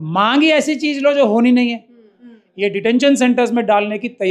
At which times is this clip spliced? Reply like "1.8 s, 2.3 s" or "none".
2.1 s